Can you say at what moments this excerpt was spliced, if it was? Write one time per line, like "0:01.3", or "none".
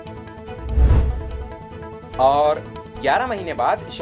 0:01.2